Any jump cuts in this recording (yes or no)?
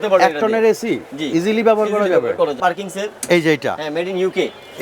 yes